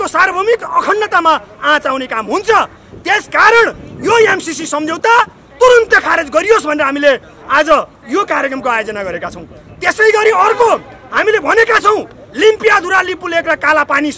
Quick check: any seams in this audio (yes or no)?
no